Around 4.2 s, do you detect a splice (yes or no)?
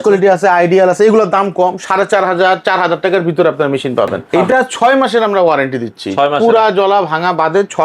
yes